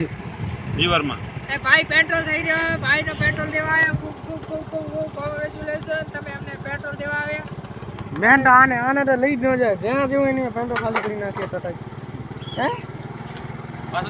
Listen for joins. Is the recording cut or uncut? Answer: uncut